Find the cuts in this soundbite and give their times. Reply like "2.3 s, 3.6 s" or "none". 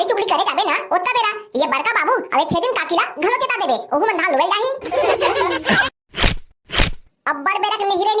5.8 s